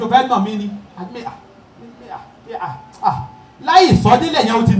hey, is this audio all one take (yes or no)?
yes